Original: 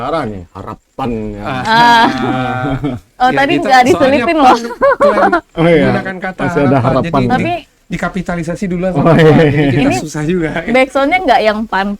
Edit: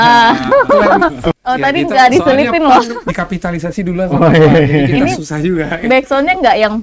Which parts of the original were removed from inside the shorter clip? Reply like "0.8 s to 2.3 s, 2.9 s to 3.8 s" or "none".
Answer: 4.7 s to 7.8 s